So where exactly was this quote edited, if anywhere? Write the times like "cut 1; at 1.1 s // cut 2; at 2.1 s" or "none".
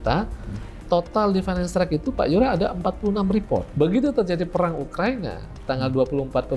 cut 1; at 3.7 s